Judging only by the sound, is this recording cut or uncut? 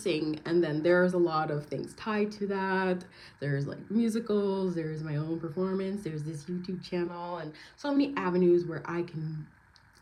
uncut